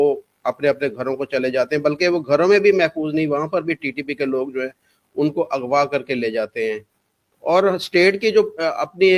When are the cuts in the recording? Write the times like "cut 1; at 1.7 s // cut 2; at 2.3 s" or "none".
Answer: none